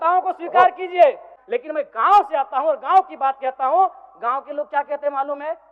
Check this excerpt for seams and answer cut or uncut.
cut